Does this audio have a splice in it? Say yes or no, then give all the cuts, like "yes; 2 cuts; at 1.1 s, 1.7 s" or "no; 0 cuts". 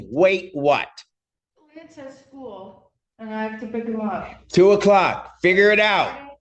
no; 0 cuts